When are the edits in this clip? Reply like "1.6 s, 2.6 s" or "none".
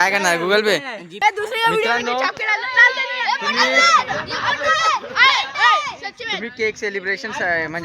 1.0 s